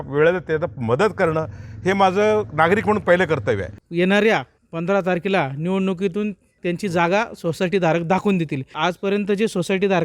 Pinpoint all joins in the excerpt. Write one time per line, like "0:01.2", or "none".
0:03.8
0:06.6
0:08.7